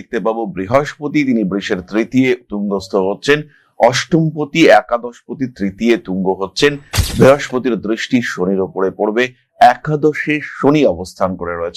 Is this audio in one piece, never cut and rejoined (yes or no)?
yes